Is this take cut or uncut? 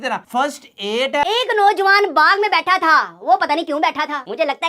cut